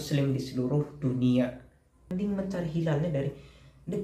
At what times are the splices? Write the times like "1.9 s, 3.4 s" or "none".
2.1 s